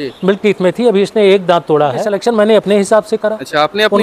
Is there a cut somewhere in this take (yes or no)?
yes